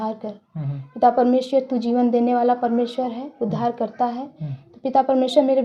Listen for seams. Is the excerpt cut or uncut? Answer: uncut